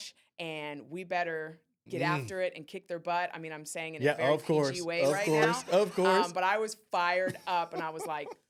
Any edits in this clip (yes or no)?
no